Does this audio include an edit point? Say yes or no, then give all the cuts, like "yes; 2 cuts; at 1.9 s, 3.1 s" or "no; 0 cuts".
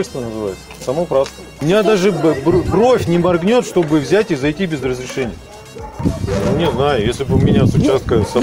yes; 2 cuts; at 1.6 s, 6.0 s